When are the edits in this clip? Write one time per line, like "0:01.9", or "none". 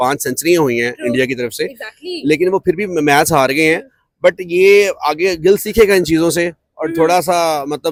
none